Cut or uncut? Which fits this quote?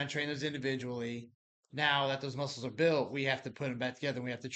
uncut